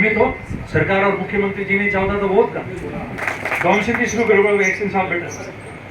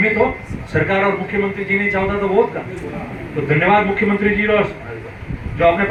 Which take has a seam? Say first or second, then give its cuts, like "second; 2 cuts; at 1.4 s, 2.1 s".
first; 1 cut; at 3.2 s